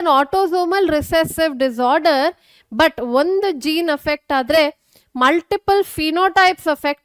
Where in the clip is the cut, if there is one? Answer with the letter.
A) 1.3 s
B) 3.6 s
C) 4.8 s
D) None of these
D